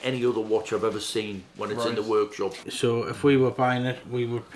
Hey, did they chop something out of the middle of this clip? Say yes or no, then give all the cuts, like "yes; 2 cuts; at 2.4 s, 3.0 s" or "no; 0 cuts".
yes; 1 cut; at 2.6 s